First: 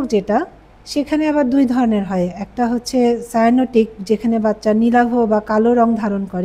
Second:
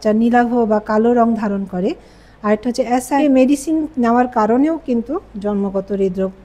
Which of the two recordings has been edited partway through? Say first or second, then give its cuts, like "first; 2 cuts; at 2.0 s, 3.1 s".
second; 1 cut; at 3.2 s